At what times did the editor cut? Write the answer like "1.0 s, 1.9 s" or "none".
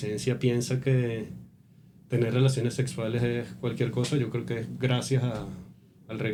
none